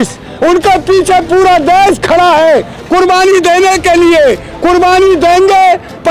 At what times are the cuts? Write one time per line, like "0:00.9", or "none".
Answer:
none